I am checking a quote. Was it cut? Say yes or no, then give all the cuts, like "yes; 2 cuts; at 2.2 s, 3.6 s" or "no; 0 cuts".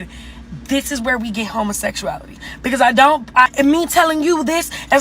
yes; 1 cut; at 3.5 s